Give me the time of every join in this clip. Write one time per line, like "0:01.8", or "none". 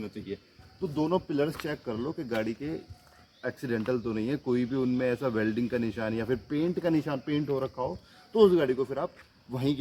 none